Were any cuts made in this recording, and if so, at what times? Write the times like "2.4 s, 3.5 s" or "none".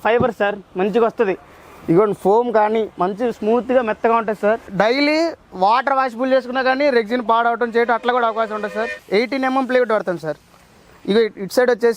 4.7 s, 8.9 s

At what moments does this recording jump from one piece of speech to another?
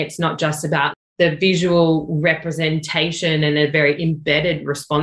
1.0 s

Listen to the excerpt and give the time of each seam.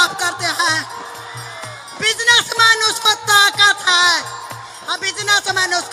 none

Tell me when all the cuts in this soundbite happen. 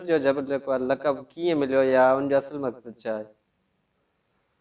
none

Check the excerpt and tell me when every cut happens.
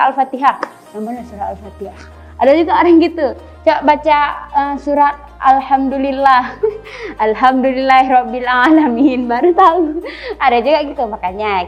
none

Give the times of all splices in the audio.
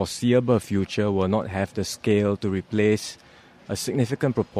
none

